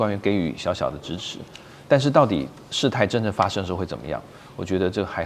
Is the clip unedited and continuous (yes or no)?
yes